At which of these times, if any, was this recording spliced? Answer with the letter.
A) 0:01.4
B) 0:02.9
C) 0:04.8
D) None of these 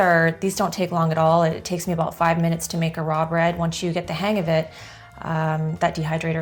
D